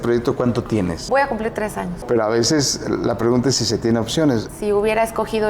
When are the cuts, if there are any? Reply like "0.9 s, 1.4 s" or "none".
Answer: 1.0 s, 2.0 s, 4.5 s